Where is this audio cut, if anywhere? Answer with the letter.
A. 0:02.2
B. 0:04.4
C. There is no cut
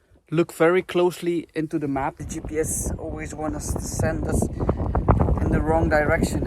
A